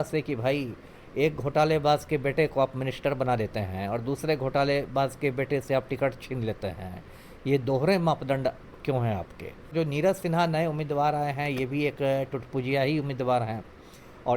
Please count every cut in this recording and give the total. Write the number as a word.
one